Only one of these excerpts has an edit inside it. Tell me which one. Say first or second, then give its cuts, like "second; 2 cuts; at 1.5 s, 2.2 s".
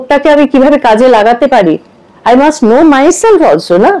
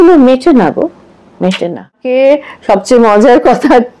second; 1 cut; at 2.0 s